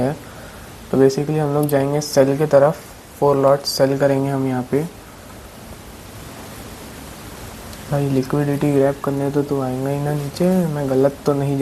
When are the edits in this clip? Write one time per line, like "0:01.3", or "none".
0:06.6